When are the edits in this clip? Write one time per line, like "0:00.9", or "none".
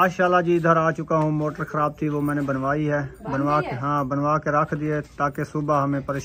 none

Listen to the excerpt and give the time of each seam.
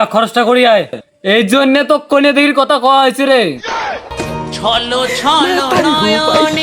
0:01.0

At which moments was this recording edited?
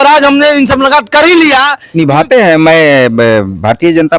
0:01.8

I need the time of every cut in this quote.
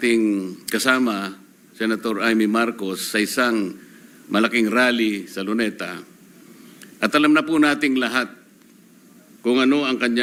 none

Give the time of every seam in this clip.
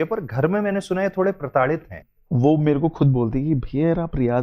0:02.0

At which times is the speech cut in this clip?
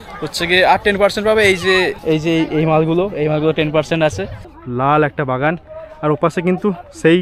0:02.0
0:04.3

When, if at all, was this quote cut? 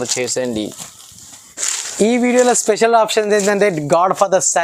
0:01.8

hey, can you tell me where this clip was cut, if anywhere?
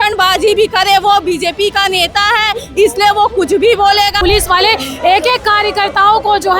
0:04.2

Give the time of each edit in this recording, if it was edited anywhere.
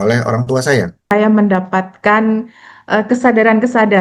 0:01.1

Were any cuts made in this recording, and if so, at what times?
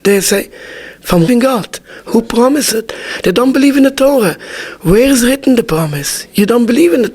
0:01.3

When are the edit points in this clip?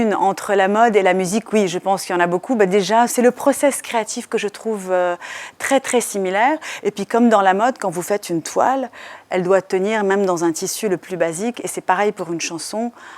0:03.1
0:09.1

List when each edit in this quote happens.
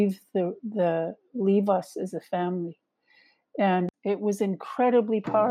0:03.9

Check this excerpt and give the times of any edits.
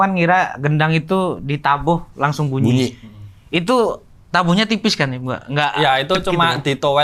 none

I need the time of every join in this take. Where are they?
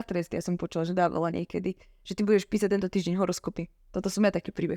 none

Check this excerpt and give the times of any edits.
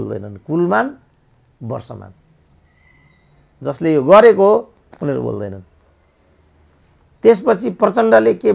none

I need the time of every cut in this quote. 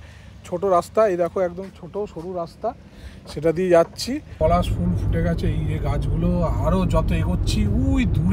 0:04.3

